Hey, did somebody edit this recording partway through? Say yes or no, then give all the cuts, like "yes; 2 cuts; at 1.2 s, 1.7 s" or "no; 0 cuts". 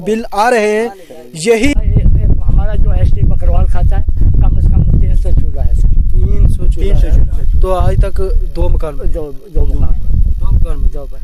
yes; 1 cut; at 1.7 s